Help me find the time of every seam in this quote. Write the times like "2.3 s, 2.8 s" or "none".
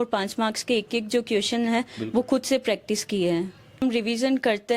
3.8 s